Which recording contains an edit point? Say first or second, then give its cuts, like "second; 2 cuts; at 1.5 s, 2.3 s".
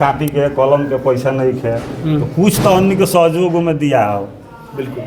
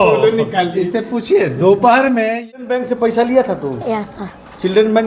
second; 1 cut; at 2.6 s